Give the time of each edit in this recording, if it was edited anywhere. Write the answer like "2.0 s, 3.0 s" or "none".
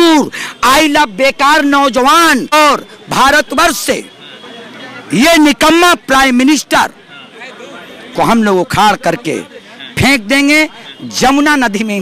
2.5 s